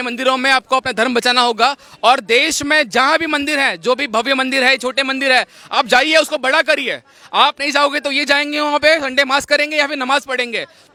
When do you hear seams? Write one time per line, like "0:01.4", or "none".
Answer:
none